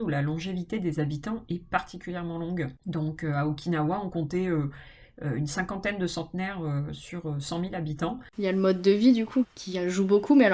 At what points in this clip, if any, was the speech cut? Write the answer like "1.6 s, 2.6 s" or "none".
2.8 s, 8.2 s, 9.5 s